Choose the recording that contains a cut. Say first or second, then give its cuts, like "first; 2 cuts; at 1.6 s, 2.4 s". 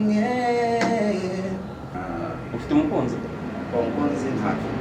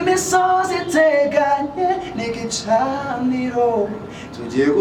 first; 1 cut; at 2.0 s